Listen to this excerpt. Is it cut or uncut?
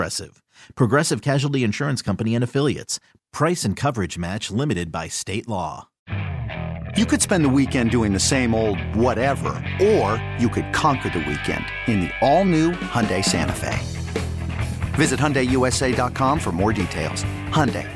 cut